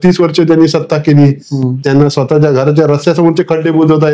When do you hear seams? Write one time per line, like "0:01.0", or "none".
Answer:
none